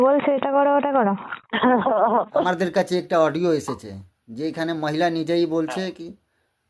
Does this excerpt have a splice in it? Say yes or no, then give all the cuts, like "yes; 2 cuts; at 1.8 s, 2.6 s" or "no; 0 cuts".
yes; 1 cut; at 2.4 s